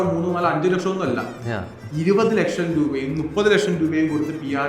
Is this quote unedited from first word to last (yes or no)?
yes